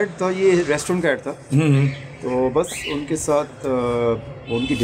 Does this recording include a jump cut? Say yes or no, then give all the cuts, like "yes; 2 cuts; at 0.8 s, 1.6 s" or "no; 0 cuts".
no; 0 cuts